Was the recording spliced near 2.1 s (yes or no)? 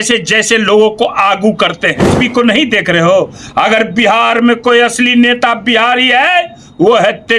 yes